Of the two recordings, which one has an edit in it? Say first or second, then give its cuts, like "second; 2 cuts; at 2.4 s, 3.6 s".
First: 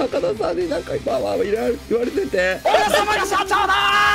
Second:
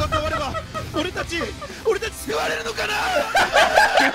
first; 1 cut; at 2.6 s